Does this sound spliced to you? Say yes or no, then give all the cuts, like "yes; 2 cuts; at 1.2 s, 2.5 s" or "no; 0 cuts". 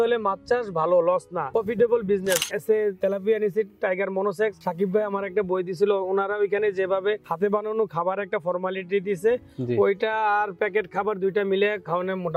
yes; 4 cuts; at 1.4 s, 2.4 s, 4.6 s, 7.3 s